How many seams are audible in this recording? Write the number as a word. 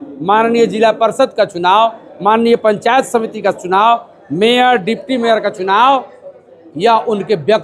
zero